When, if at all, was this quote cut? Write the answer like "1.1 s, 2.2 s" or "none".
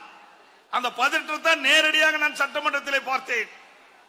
none